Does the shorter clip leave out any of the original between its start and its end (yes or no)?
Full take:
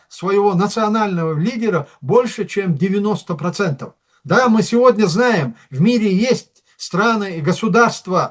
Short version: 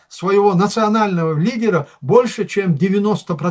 no